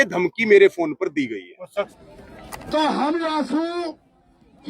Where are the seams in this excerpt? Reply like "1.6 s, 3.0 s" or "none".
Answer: 1.9 s

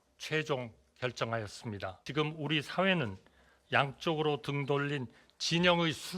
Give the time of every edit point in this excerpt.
2.0 s

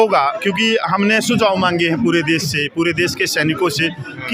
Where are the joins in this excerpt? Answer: none

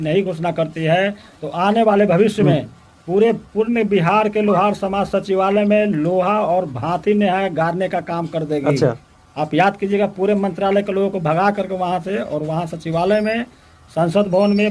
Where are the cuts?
none

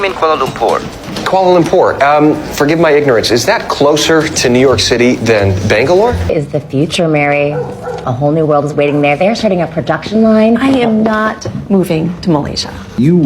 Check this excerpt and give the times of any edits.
6.3 s

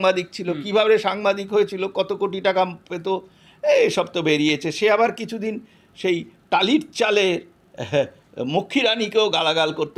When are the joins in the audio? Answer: none

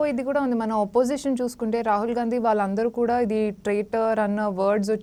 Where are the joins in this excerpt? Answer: none

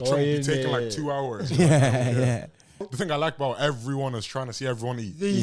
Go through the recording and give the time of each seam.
2.9 s

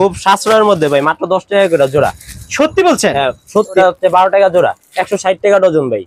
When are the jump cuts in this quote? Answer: 3.8 s

